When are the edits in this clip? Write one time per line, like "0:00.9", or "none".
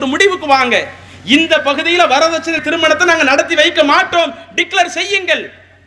0:02.6